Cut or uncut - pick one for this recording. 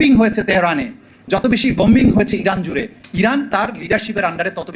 uncut